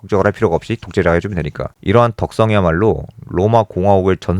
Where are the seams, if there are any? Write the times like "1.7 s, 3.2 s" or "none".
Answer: 1.7 s